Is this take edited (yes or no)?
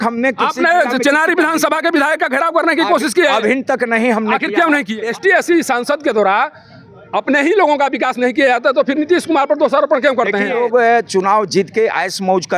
yes